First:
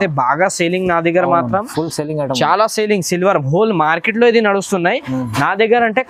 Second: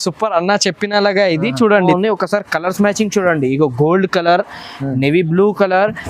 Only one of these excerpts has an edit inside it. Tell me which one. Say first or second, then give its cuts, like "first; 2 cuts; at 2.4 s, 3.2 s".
second; 1 cut; at 1.9 s